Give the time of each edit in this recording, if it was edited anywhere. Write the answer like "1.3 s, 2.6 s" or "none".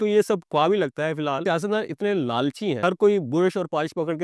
1.4 s, 2.8 s